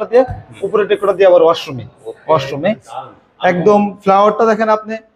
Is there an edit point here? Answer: yes; 1 cut; at 2.9 s

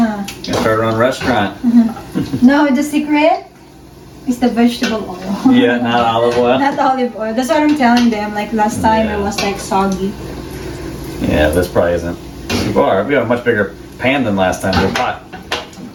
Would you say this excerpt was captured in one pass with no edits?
yes; 0 cuts

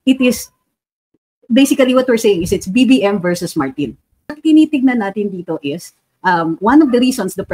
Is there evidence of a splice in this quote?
yes; 1 cut; at 4.4 s

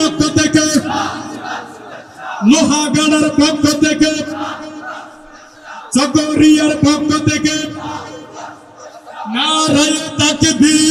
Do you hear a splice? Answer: no; 0 cuts

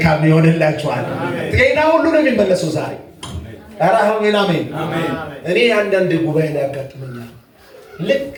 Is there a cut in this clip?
no; 0 cuts

